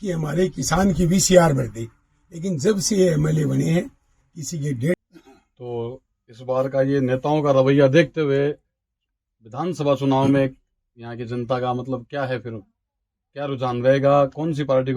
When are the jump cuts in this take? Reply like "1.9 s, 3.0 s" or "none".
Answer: 5.0 s

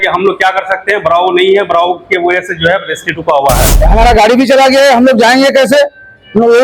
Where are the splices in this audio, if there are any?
3.7 s

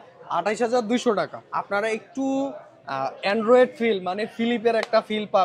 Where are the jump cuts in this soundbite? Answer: 1.4 s

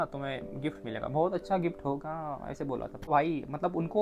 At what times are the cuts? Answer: 3.1 s

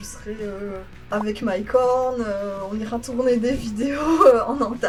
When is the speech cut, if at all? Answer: none

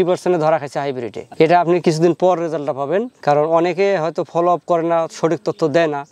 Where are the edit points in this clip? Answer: none

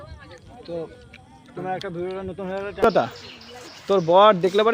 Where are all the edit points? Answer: 2.8 s

